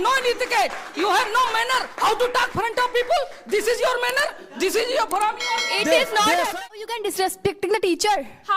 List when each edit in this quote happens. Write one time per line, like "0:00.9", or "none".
0:06.8